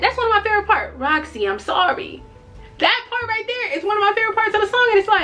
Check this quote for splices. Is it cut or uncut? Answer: uncut